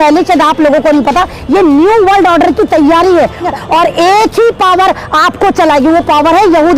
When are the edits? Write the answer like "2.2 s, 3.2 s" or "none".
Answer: 3.5 s